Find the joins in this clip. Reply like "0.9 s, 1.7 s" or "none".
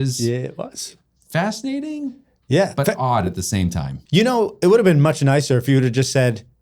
3.9 s